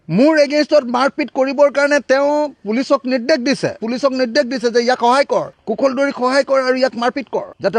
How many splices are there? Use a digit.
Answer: 1